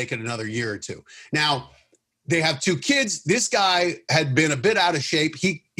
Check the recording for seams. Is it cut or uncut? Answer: uncut